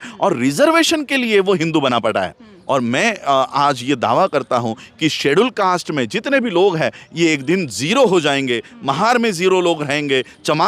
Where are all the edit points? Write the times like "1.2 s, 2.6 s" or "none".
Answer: 2.6 s